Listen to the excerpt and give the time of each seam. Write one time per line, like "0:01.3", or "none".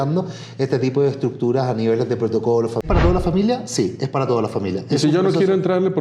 0:03.0